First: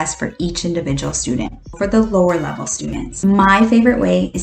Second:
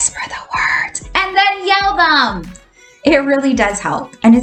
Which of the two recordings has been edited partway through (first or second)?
first